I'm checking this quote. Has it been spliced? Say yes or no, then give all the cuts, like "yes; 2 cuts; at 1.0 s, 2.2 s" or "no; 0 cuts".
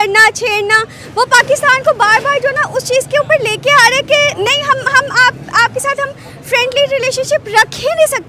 no; 0 cuts